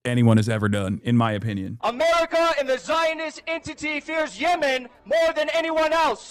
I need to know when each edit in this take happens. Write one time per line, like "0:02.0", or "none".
0:01.7